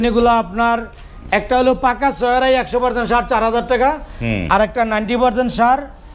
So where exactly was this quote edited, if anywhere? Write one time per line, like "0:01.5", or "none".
none